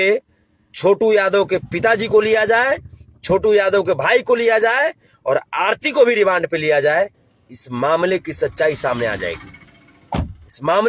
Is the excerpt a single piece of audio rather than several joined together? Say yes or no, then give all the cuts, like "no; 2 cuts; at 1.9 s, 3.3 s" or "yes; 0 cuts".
yes; 0 cuts